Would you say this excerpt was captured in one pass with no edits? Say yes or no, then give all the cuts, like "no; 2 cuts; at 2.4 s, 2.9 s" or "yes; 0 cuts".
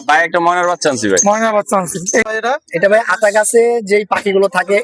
no; 1 cut; at 2.2 s